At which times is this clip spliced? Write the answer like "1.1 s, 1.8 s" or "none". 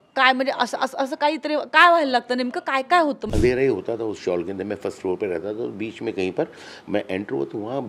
3.3 s